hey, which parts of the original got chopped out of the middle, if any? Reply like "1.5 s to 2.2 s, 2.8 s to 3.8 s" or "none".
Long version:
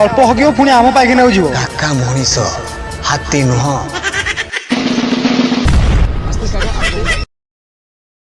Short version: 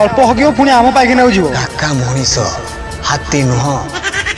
none

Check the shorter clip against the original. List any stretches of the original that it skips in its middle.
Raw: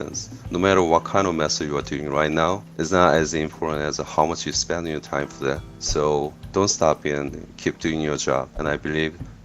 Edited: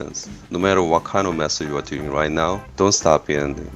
2.7 s to 6.4 s

